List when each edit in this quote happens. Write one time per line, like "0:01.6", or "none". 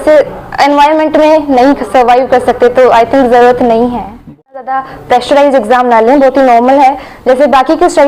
0:04.6